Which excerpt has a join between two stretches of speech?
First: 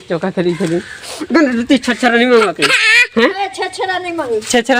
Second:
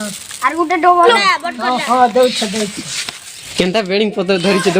second; 2 cuts; at 1.1 s, 3.4 s

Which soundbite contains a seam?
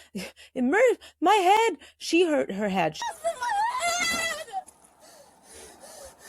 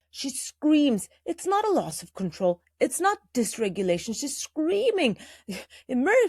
first; 1 cut; at 3.1 s

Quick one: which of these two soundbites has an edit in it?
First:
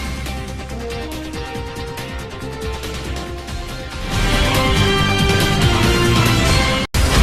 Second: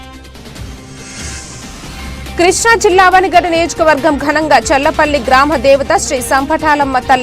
second; 1 cut; at 2.4 s

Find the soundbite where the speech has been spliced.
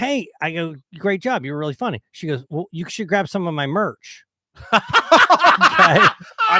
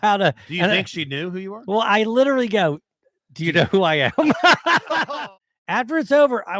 second; 1 cut; at 5.2 s

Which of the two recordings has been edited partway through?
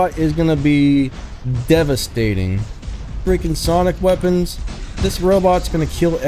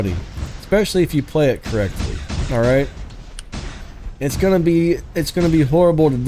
first; 1 cut; at 3.2 s

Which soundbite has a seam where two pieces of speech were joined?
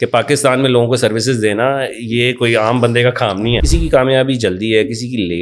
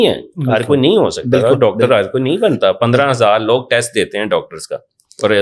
first; 1 cut; at 3.6 s

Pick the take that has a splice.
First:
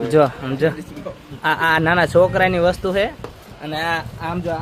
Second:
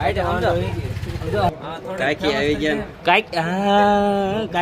second; 1 cut; at 1.5 s

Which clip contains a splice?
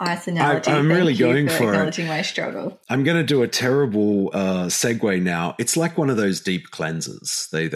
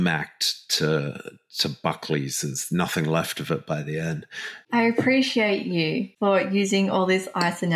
second; 2 cuts; at 4.5 s, 6.1 s

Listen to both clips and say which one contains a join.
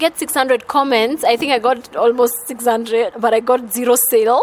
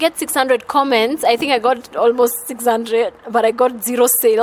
first; 1 cut; at 3.1 s

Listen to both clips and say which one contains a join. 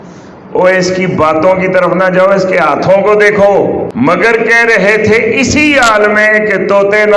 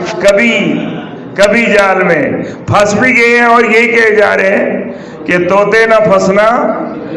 first; 1 cut; at 3.9 s

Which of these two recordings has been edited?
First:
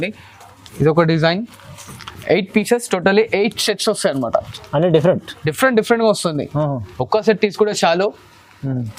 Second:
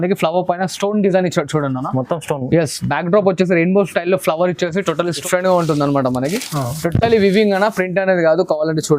second; 1 cut; at 5.2 s

